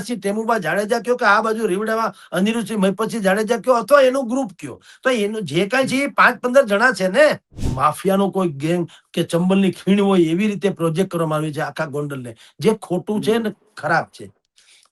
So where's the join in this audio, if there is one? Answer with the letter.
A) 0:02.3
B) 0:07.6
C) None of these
B